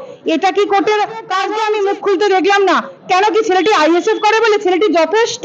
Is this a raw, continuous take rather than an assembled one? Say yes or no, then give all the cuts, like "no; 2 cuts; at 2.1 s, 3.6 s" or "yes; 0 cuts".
no; 1 cut; at 1.4 s